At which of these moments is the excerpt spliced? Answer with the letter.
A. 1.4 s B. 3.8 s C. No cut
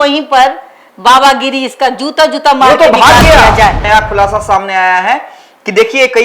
B